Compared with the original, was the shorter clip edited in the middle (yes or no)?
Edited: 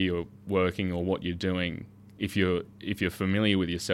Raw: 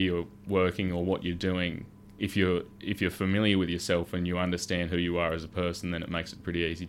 no